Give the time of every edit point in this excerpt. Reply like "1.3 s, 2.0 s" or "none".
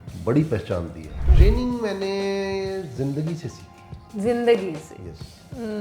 1.2 s